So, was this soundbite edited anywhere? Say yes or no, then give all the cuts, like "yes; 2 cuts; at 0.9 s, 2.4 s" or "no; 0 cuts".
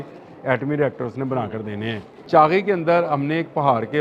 yes; 1 cut; at 2.1 s